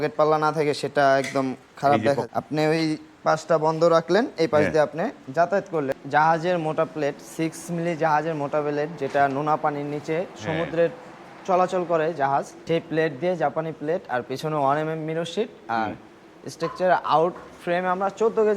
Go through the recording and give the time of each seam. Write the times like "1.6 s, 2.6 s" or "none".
2.2 s, 6.0 s, 12.6 s